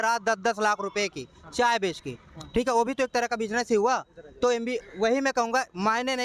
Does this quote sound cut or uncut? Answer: uncut